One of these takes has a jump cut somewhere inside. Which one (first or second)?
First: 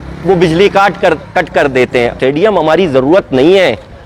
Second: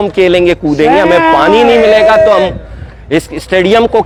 first